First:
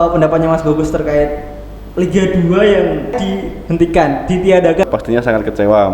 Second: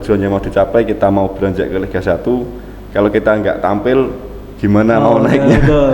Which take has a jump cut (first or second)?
first